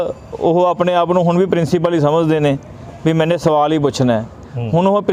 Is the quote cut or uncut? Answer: uncut